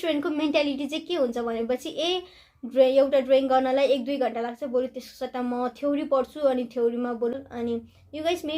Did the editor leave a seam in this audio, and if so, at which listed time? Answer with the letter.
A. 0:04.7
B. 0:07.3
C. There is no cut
B